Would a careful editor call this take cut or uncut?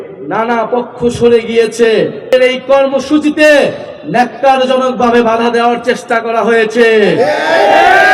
cut